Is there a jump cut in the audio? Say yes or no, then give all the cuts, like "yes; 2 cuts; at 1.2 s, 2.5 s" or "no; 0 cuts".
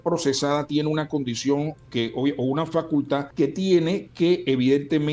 yes; 1 cut; at 3.3 s